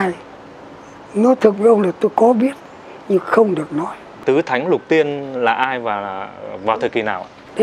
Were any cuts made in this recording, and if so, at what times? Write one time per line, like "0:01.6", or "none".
none